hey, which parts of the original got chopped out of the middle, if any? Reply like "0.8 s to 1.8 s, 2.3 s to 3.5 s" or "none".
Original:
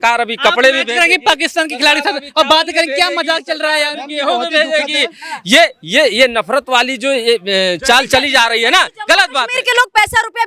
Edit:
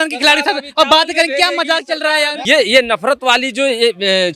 4.0 s to 5.8 s